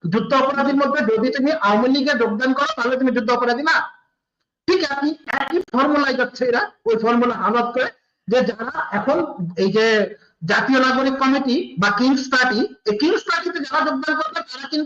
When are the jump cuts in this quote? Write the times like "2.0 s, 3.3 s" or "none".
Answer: none